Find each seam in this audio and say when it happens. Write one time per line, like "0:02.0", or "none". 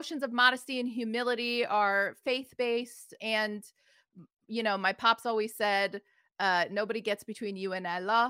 0:03.1